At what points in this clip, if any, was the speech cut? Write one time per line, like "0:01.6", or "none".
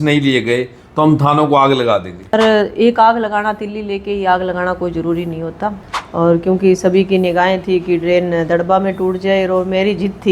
0:02.3
0:05.9